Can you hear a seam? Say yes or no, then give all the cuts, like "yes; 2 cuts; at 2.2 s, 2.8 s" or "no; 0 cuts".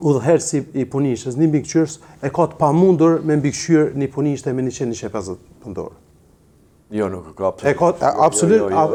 no; 0 cuts